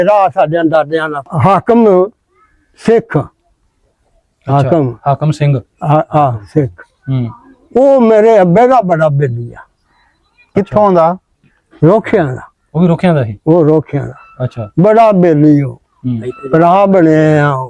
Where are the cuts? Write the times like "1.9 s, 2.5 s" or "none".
1.3 s

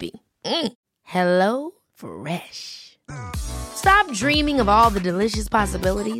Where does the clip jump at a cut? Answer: none

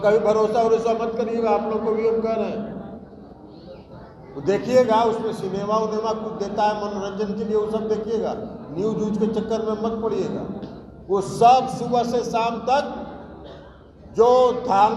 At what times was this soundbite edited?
none

